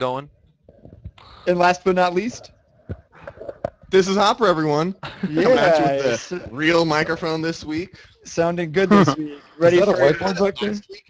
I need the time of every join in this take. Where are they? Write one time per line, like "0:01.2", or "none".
none